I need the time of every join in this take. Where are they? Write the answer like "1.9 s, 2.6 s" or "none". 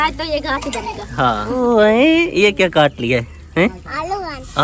1.6 s